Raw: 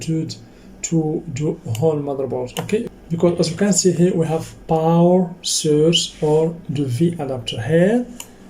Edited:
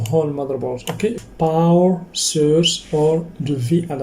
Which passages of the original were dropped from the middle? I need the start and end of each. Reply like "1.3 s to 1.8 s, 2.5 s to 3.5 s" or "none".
2.9 s to 4.5 s